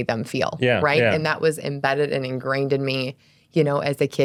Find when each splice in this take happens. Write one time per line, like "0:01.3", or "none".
none